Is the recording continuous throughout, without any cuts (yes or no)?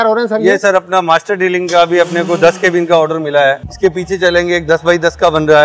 no